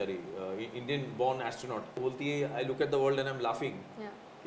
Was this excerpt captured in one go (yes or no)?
no